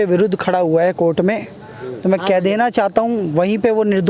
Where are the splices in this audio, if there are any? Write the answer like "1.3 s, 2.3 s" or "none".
none